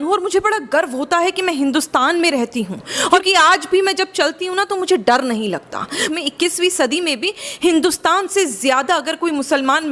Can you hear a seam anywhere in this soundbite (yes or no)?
yes